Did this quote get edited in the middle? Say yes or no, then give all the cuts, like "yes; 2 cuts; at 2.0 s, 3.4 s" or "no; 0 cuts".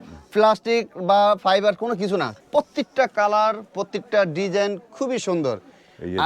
yes; 1 cut; at 2.3 s